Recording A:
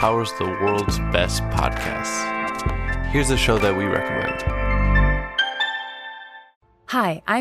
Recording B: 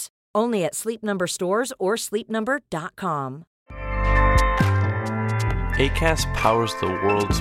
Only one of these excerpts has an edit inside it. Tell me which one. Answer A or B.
B